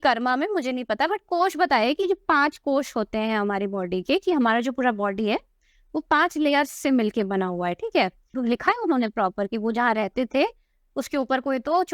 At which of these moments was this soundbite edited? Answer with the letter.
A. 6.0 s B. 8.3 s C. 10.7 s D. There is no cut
B